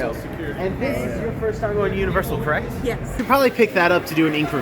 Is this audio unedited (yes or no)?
no